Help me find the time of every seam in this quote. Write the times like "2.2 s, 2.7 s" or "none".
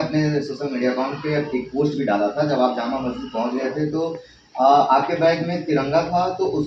none